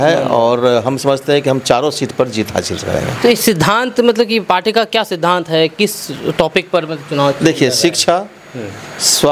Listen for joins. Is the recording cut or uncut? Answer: uncut